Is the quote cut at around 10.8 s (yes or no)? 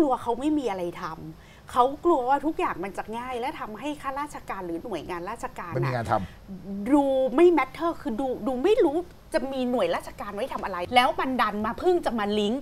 yes